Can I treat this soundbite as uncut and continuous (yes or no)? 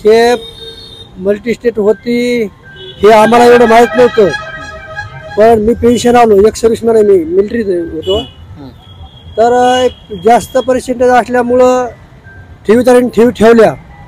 yes